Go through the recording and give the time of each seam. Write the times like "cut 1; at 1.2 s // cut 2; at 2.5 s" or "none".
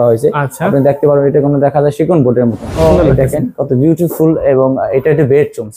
cut 1; at 2.9 s